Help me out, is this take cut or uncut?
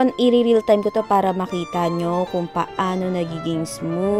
uncut